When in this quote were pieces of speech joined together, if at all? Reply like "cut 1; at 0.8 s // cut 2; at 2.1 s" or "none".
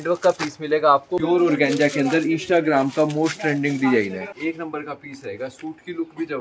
cut 1; at 1.2 s // cut 2; at 4.3 s